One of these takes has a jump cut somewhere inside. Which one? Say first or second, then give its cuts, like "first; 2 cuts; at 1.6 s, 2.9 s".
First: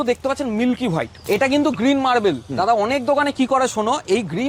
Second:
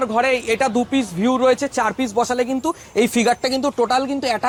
first; 1 cut; at 1.2 s